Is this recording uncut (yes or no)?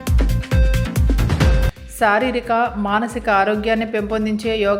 no